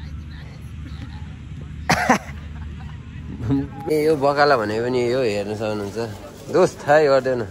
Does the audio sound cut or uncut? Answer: cut